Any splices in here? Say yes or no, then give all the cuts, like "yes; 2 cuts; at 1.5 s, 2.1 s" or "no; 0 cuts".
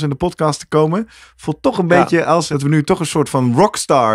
yes; 1 cut; at 2.5 s